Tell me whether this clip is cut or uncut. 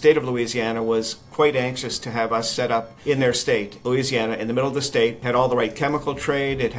cut